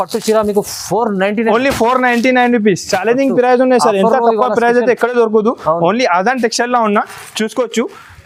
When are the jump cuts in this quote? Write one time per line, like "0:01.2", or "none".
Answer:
none

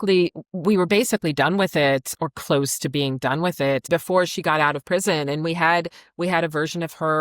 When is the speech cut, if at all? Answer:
0:03.9

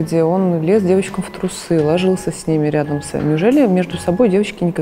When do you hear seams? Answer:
0:03.1

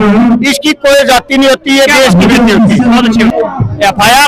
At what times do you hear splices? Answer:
0:03.3

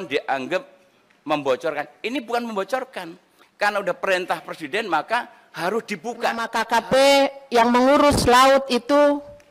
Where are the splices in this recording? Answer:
0:06.5

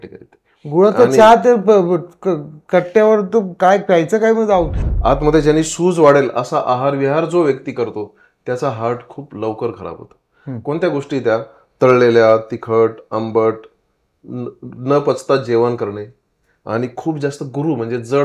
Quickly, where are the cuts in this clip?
0:04.8

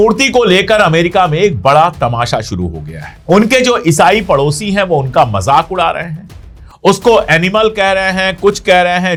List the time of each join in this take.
none

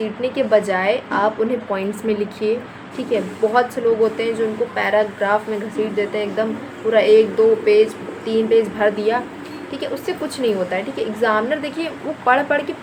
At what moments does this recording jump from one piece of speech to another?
none

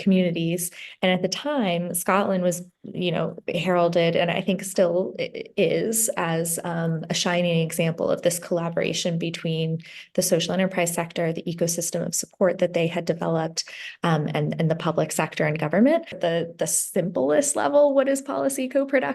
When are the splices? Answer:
0:16.2

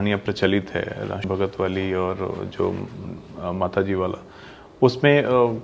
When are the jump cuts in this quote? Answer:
0:01.2

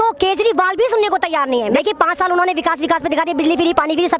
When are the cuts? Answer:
0:01.8

